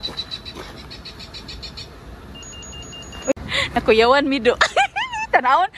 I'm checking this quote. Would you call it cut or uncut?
uncut